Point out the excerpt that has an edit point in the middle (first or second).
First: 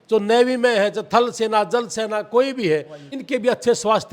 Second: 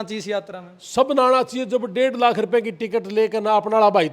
first